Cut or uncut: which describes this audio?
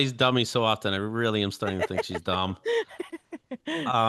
uncut